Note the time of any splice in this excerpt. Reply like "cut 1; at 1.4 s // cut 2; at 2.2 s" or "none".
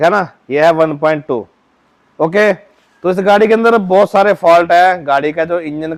none